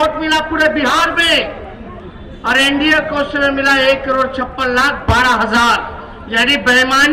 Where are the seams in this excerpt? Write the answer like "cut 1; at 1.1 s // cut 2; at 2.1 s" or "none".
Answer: none